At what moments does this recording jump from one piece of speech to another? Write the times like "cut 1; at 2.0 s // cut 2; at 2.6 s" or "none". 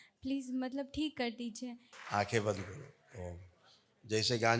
cut 1; at 1.9 s